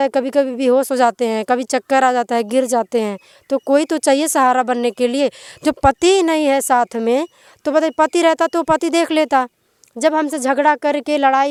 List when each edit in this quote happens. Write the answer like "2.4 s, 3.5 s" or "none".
none